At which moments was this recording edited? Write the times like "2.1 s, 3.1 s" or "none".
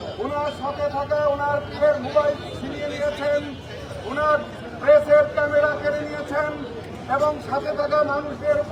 none